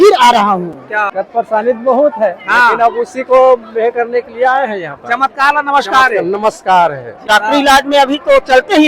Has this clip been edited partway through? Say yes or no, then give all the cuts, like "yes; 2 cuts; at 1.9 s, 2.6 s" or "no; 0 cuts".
yes; 2 cuts; at 1.1 s, 7.2 s